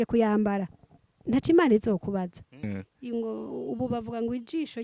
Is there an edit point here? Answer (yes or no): yes